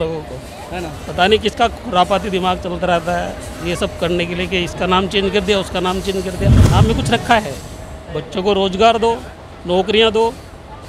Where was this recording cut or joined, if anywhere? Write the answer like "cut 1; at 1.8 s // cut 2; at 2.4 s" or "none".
cut 1; at 6.6 s